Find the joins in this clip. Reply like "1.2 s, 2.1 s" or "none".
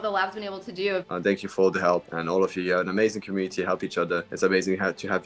1.0 s, 2.1 s, 4.3 s